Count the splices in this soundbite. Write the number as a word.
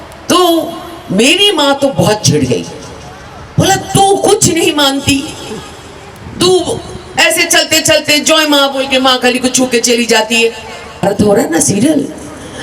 one